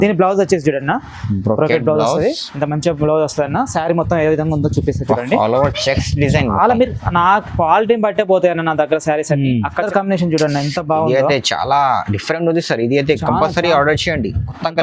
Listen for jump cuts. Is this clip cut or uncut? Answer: cut